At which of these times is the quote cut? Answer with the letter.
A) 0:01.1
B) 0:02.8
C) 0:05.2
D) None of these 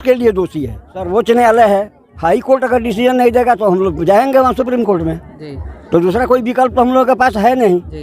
A